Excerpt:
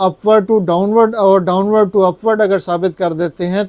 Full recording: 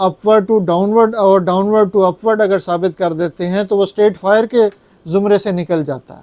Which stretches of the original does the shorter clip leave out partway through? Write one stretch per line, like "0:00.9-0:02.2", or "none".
none